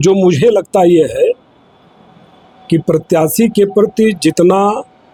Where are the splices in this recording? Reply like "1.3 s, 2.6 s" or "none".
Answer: none